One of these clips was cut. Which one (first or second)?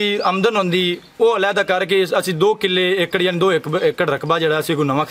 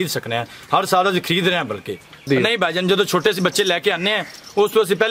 second